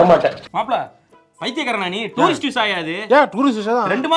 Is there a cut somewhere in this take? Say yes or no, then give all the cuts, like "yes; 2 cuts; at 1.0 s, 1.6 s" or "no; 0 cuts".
no; 0 cuts